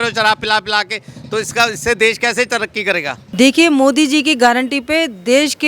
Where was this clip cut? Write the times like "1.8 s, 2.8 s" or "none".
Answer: 3.2 s